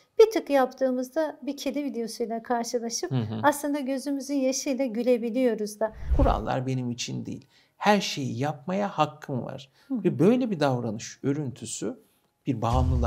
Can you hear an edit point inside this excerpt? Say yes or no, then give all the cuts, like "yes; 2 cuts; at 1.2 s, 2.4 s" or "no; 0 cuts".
yes; 1 cut; at 6.0 s